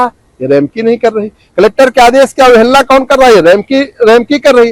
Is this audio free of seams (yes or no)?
yes